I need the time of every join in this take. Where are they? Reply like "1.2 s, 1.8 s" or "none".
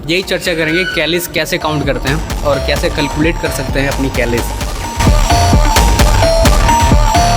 none